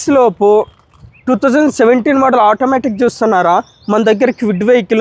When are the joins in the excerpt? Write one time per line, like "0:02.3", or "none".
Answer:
none